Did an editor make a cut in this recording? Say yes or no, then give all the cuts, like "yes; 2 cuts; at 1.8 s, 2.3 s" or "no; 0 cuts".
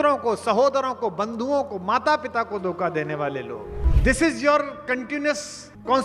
yes; 1 cut; at 3.8 s